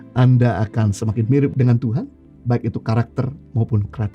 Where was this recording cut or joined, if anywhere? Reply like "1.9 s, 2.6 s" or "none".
1.5 s